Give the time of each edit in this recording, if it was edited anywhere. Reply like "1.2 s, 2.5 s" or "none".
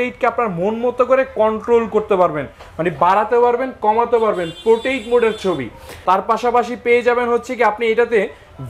5.9 s